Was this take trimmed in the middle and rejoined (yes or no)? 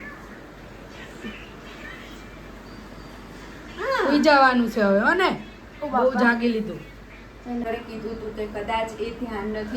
yes